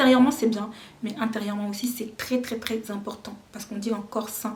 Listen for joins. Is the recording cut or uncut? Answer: uncut